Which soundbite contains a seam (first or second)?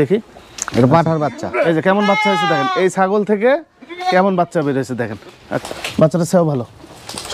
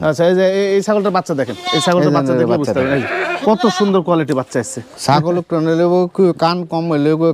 first